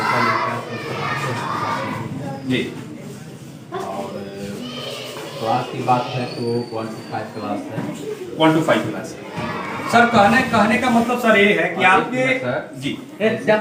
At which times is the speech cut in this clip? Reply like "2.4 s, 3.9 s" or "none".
none